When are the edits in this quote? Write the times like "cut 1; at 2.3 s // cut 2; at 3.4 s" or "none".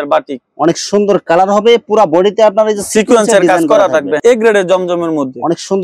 cut 1; at 4.2 s